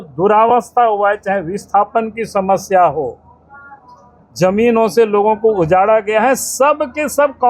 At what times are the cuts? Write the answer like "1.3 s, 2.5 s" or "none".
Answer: none